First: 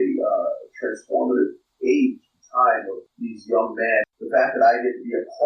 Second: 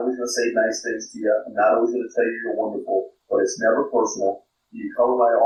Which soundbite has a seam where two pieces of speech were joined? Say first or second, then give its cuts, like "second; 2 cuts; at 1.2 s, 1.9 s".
first; 3 cuts; at 1.6 s, 3.0 s, 4.1 s